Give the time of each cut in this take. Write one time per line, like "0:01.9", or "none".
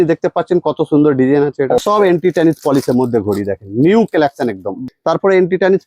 0:01.8
0:04.8